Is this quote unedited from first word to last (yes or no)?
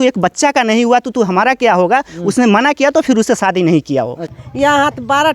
no